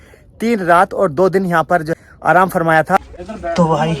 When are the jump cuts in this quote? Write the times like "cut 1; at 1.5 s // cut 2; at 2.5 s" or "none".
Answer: cut 1; at 1.9 s // cut 2; at 3.1 s